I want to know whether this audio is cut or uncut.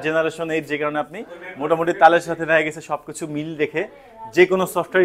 uncut